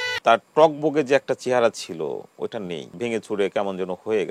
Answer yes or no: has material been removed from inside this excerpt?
yes